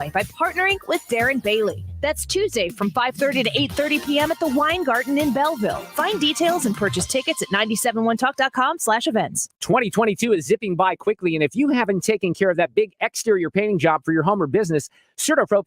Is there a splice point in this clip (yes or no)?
yes